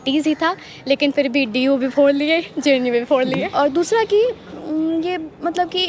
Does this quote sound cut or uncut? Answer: cut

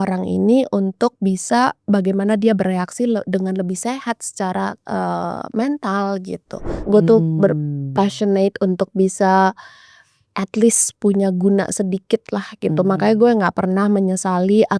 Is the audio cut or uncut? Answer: cut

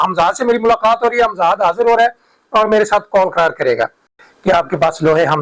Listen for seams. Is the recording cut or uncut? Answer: cut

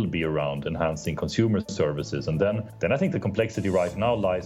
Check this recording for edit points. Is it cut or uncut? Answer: cut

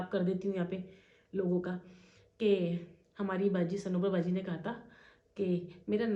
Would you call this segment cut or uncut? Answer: uncut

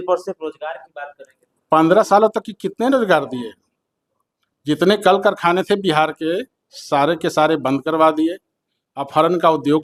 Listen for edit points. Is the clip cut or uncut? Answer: uncut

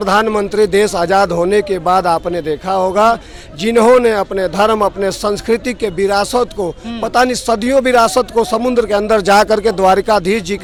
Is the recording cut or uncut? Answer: uncut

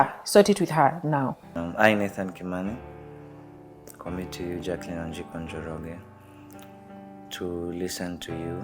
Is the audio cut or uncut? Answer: cut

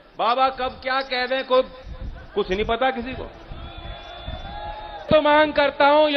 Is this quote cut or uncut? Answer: cut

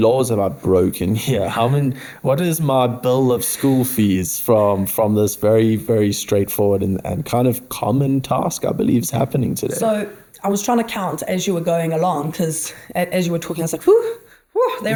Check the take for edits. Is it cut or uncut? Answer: uncut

